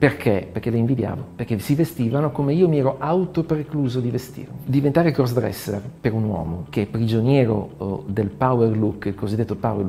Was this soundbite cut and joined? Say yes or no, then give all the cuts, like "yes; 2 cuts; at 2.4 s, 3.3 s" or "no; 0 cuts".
yes; 1 cut; at 4.6 s